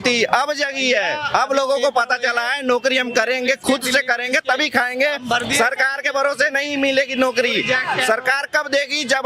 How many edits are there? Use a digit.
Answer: 0